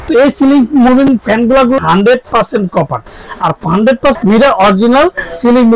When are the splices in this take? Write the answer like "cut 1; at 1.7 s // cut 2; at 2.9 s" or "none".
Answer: cut 1; at 1.8 s // cut 2; at 4.2 s